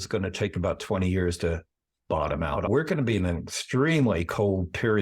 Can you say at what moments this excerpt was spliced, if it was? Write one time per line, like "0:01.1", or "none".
0:02.7